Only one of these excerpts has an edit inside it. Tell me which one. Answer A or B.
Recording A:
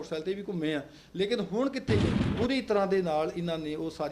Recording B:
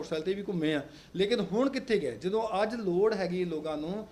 A